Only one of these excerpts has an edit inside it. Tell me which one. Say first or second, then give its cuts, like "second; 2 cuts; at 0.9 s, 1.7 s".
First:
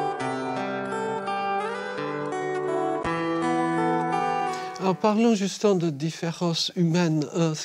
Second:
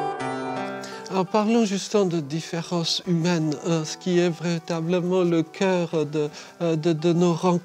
second; 1 cut; at 1.0 s